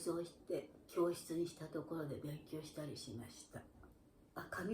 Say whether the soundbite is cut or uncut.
cut